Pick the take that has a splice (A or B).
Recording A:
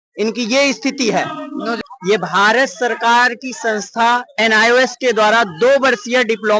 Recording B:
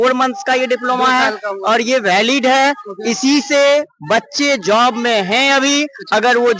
A